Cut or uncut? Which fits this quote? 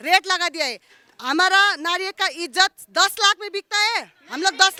uncut